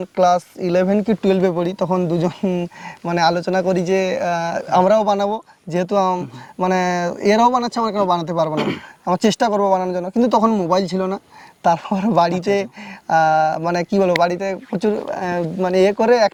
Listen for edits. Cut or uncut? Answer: uncut